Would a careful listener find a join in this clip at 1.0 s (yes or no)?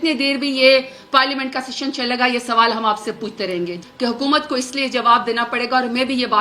no